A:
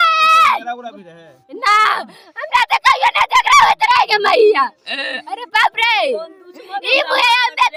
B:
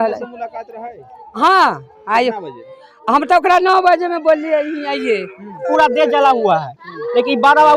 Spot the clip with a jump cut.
B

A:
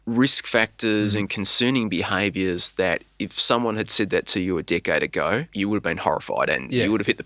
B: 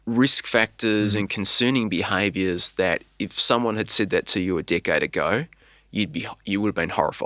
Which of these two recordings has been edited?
A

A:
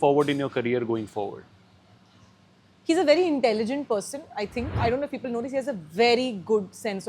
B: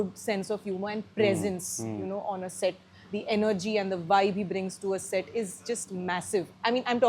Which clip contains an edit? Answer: A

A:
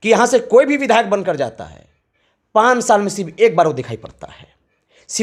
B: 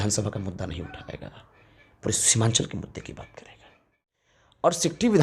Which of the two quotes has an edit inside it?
B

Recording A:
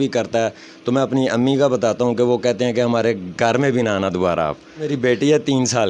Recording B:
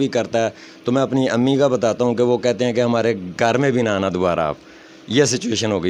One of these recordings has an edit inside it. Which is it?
A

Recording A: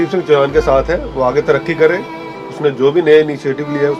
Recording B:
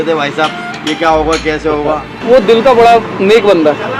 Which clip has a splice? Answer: B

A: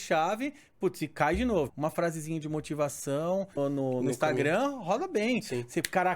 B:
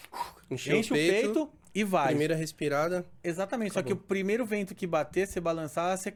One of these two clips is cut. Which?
A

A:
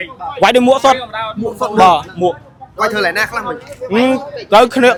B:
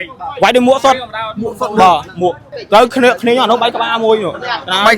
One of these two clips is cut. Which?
B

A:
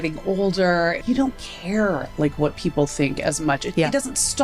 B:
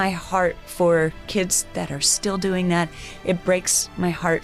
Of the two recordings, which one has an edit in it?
A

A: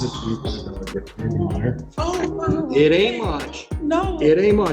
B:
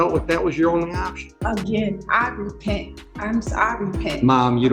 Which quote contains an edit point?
B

